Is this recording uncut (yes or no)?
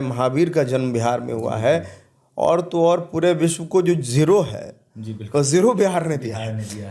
yes